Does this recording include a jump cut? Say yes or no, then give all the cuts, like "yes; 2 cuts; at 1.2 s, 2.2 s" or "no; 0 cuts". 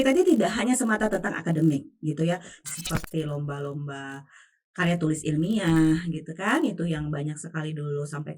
yes; 1 cut; at 2.5 s